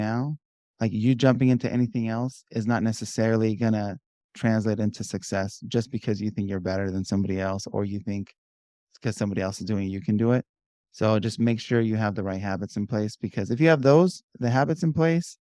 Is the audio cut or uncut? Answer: uncut